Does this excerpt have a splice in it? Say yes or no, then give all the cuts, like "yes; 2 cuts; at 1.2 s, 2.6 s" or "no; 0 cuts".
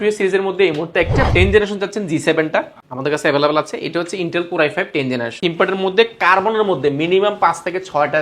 yes; 2 cuts; at 1.3 s, 5.4 s